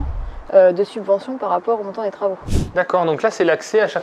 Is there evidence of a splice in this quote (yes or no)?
yes